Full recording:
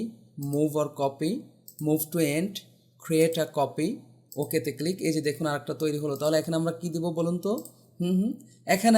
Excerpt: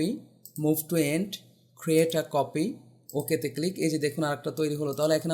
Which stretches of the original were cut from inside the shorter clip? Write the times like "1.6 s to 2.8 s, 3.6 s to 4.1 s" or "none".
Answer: none

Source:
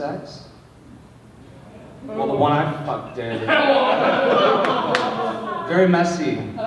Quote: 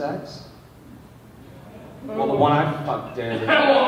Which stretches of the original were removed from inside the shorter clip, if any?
none

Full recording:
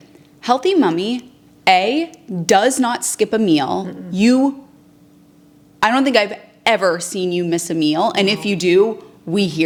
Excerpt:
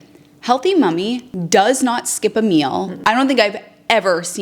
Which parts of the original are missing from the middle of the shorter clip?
1.3 s to 2.3 s, 3.9 s to 5.7 s

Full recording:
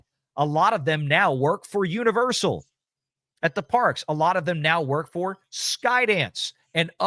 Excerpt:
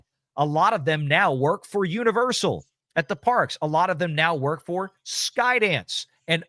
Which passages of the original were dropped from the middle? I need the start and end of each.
2.7 s to 3.2 s

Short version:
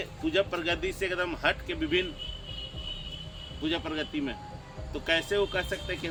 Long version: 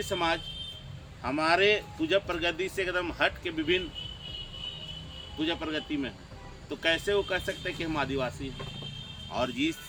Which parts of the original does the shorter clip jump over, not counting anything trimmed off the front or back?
none

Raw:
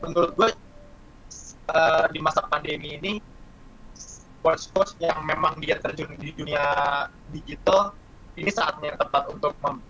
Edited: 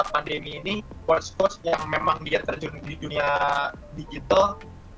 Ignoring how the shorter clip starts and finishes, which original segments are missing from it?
3.3 s to 4.3 s

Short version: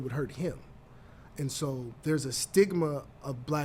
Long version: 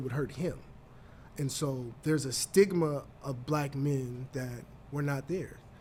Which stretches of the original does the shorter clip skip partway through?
none

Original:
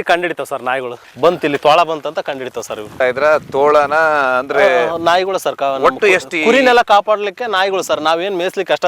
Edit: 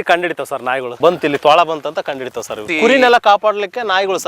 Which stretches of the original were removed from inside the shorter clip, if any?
0.9 s to 1.1 s, 2.9 s to 6.3 s

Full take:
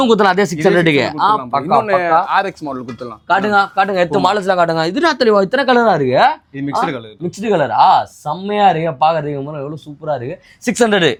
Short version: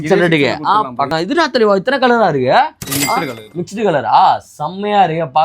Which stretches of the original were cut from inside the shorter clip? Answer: 1.6 s to 4.8 s

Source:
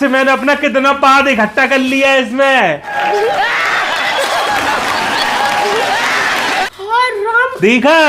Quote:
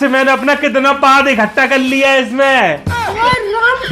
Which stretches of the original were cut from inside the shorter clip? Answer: 2.9 s to 6.7 s

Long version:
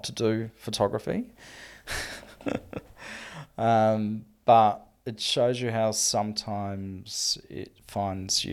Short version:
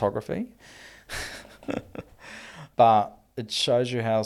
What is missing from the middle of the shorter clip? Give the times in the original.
3.4 s to 4.3 s

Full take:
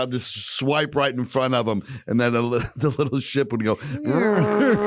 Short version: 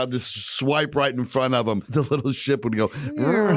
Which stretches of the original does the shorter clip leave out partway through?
1.9 s to 2.7 s

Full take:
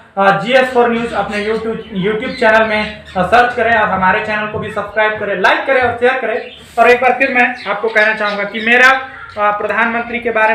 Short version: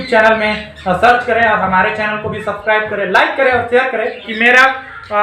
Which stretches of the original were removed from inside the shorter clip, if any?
6.6 s to 8.5 s

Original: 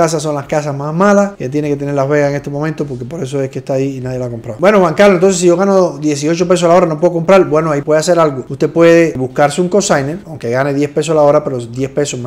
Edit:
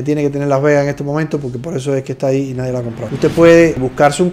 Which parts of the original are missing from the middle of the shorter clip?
4.5 s to 8.4 s

